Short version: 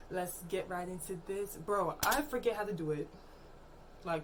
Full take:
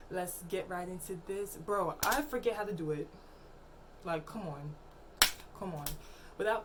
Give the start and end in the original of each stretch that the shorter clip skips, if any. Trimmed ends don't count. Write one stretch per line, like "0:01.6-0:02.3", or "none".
none